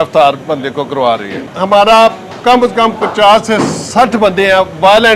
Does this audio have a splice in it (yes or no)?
yes